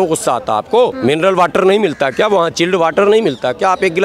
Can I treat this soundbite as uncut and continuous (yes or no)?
no